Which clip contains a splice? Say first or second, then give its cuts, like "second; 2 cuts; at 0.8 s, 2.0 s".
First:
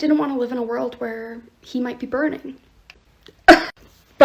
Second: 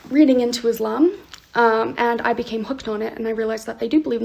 first; 1 cut; at 2.8 s